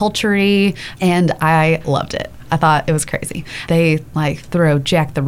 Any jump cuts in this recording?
yes; 2 cuts; at 0.9 s, 3.6 s

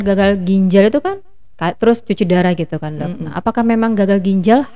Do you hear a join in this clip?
no; 0 cuts

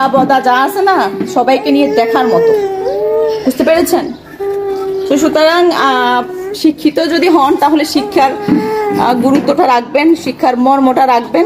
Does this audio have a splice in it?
no; 0 cuts

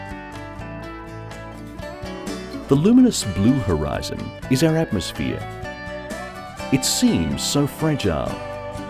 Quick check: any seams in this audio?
no; 0 cuts

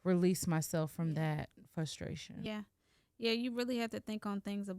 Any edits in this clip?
yes; 1 cut; at 2.5 s

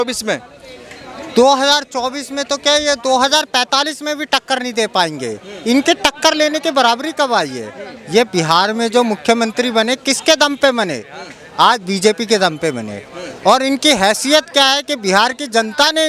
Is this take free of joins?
yes; 0 cuts

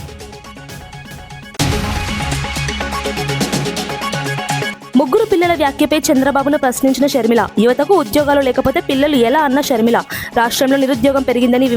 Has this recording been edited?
yes; 2 cuts; at 1.3 s, 4.7 s

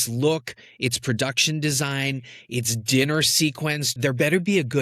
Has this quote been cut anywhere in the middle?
yes; 1 cut; at 3.9 s

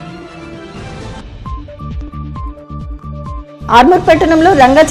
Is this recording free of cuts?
no; 1 cut; at 1.2 s

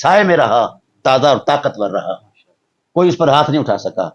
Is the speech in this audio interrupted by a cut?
no; 0 cuts

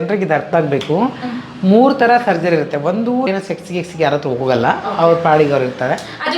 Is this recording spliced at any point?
yes; 1 cut; at 3.3 s

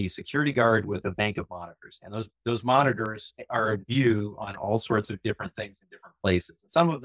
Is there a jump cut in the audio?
no; 0 cuts

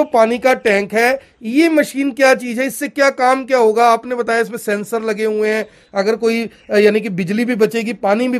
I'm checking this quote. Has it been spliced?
no; 0 cuts

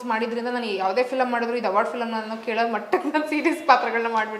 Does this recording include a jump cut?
no; 0 cuts

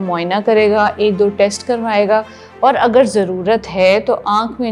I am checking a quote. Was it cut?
no; 0 cuts

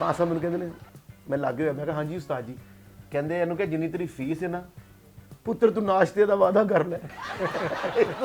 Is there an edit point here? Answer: no; 0 cuts

